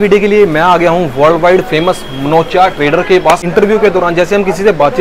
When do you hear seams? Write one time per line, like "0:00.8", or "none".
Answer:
0:03.4